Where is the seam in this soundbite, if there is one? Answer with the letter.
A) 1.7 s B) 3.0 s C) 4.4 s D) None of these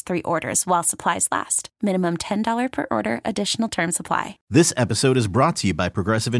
C